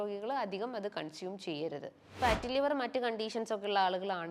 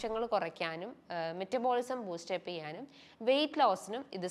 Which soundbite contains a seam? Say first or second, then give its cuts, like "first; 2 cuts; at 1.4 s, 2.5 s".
first; 1 cut; at 2.2 s